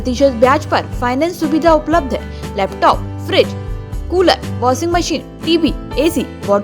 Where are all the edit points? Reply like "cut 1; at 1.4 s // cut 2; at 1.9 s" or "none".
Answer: none